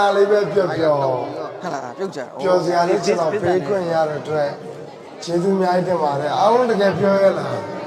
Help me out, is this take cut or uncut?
uncut